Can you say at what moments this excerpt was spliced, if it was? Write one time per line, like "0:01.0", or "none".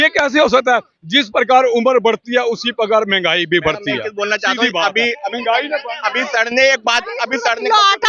none